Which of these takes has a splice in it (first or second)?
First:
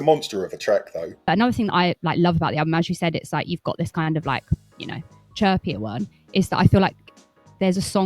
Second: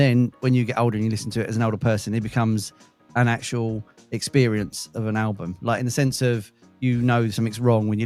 first